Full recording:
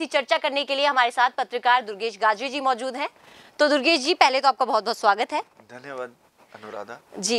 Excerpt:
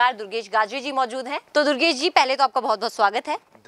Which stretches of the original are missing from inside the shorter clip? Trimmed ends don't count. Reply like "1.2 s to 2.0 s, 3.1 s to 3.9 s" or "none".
3.1 s to 3.4 s